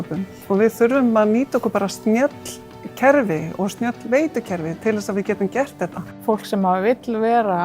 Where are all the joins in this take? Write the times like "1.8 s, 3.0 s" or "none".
6.2 s

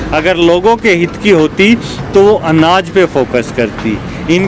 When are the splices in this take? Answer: none

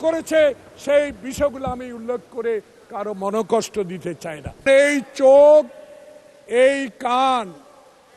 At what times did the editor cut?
4.6 s

